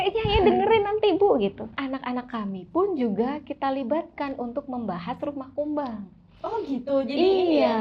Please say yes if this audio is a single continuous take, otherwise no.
no